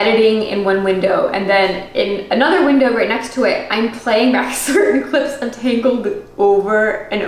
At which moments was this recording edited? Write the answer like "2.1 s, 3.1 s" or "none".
none

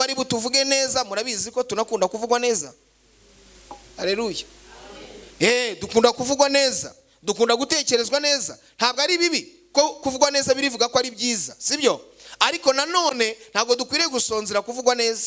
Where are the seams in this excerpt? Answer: none

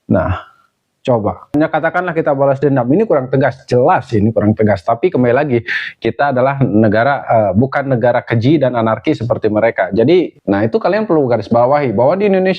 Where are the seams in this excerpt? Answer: 1.5 s, 10.3 s

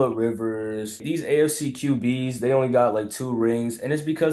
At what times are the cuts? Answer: 1.0 s

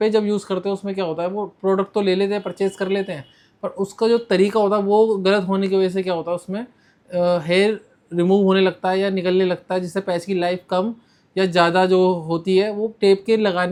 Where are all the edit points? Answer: none

